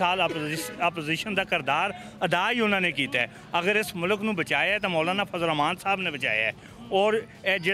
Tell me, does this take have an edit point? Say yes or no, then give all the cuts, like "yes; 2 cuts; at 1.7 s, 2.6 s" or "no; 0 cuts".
no; 0 cuts